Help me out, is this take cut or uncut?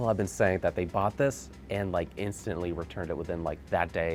uncut